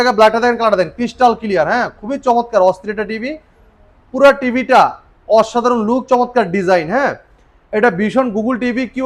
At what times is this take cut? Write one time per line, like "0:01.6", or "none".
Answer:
none